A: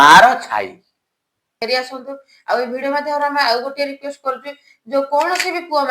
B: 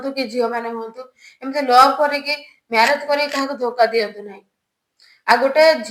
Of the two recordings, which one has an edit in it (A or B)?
A